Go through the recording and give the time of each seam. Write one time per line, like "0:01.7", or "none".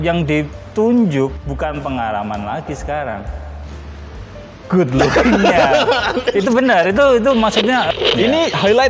0:07.9